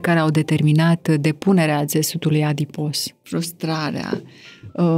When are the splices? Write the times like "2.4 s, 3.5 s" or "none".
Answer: 3.1 s